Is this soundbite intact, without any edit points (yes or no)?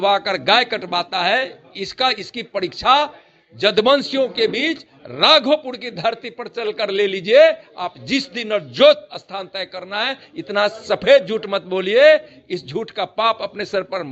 yes